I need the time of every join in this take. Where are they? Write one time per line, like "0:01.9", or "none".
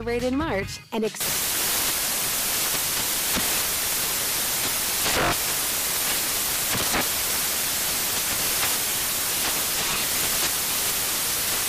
none